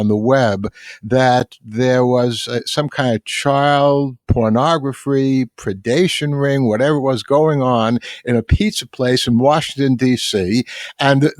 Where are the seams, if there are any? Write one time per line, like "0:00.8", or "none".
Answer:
0:04.2